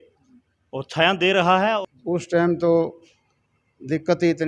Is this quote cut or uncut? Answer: cut